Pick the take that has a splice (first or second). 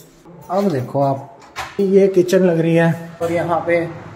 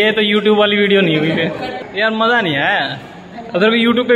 first